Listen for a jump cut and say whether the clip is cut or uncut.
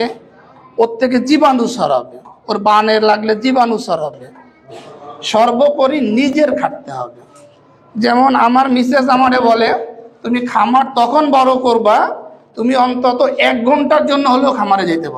cut